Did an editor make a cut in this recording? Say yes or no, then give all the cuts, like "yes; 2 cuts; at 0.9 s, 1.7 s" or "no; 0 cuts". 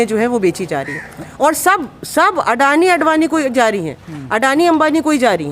no; 0 cuts